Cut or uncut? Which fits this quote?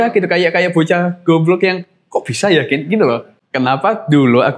cut